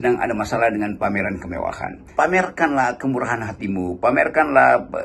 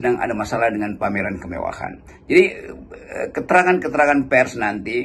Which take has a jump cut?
first; 1 cut; at 2.0 s

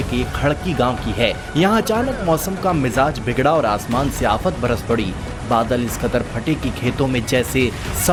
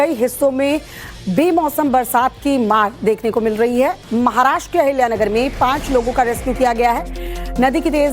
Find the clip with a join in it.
second; 1 cut; at 5.0 s

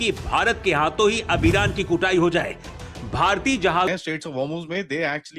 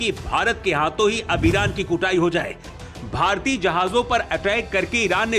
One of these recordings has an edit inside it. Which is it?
first; 1 cut; at 3.9 s

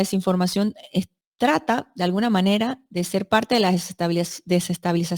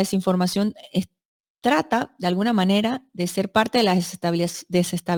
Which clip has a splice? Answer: first; 1 cut; at 1.2 s

